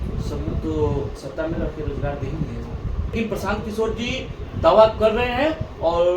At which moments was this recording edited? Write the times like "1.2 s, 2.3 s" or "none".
3.1 s